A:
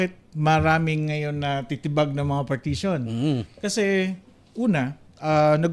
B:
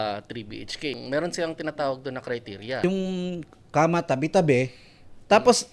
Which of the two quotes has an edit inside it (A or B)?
B